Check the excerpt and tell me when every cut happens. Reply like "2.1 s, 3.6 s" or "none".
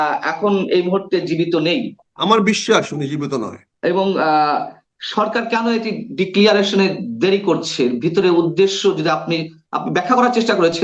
2.0 s, 3.6 s